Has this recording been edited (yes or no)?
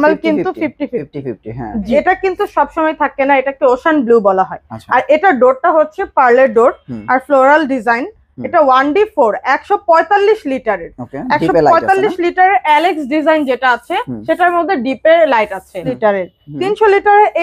yes